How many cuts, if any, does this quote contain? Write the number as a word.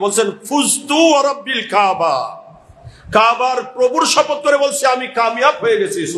zero